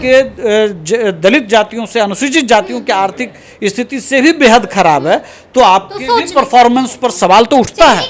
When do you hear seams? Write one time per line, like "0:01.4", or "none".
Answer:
none